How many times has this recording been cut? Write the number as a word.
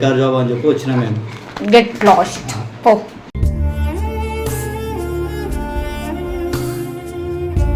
zero